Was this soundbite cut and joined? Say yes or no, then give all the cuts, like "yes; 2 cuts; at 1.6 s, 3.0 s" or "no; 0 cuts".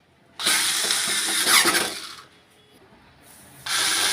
yes; 1 cut; at 2.7 s